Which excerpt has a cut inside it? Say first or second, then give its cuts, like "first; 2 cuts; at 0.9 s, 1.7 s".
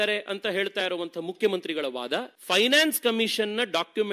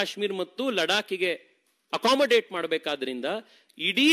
first; 1 cut; at 2.3 s